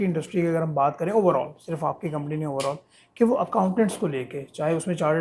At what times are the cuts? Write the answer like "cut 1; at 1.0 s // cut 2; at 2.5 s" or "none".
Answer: none